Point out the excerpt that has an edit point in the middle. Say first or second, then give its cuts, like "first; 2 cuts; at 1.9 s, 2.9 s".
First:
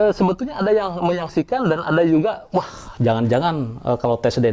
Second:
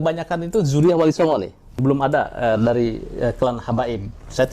second; 1 cut; at 1.7 s